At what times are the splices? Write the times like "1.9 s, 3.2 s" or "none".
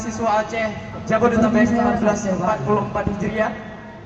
2.2 s